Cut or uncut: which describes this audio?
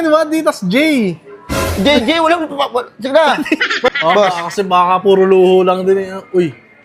cut